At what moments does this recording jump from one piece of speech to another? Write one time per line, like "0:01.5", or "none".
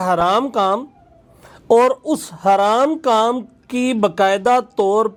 none